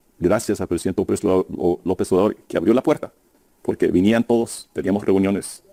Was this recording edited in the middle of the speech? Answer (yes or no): no